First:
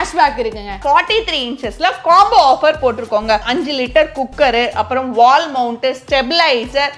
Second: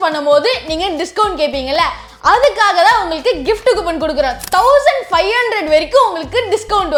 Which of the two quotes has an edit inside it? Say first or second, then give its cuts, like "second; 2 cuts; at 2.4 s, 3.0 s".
first; 2 cuts; at 0.8 s, 3.5 s